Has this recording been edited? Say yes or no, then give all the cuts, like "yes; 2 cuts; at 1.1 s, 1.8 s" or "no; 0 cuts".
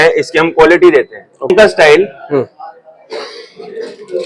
yes; 1 cut; at 1.5 s